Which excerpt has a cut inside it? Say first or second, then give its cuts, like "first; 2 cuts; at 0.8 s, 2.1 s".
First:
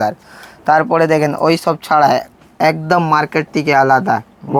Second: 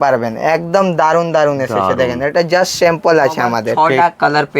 second; 1 cut; at 3.7 s